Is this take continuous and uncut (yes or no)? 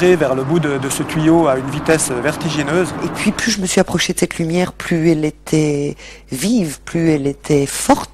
no